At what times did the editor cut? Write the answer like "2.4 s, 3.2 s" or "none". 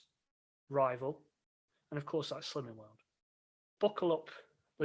3.7 s